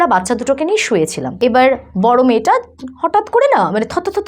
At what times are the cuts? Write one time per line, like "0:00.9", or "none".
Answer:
0:01.2